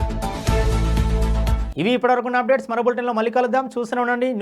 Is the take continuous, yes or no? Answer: yes